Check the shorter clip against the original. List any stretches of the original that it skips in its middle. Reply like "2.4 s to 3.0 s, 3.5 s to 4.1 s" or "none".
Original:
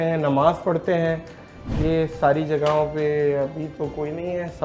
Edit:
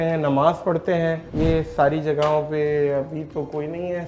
1.3 s to 1.7 s